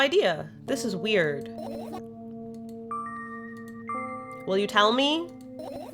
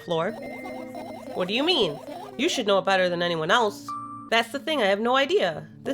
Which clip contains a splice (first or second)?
second